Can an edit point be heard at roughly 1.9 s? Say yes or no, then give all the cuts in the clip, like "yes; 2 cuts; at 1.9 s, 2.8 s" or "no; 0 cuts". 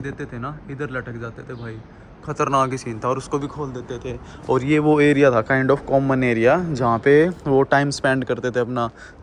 no; 0 cuts